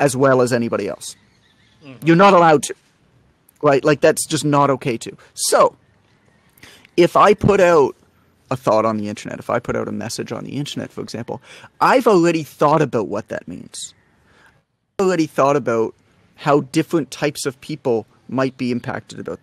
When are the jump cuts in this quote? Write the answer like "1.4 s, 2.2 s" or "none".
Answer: 12.0 s